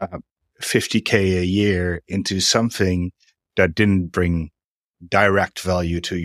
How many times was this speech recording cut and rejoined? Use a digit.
0